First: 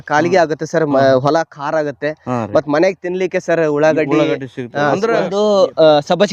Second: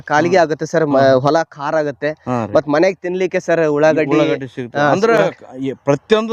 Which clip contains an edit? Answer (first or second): first